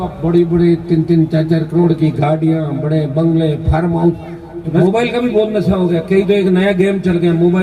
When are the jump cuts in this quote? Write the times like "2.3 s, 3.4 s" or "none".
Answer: 4.6 s